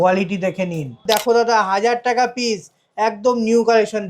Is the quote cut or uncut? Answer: cut